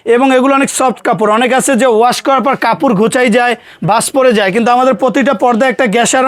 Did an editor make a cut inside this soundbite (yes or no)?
no